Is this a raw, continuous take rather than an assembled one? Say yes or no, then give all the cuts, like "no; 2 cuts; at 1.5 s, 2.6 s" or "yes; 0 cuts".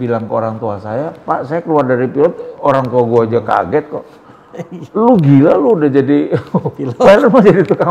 yes; 0 cuts